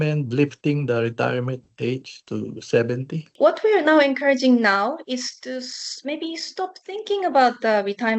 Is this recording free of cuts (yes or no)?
yes